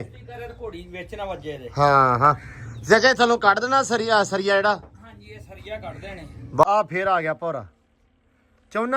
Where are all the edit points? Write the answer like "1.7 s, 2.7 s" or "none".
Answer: 6.6 s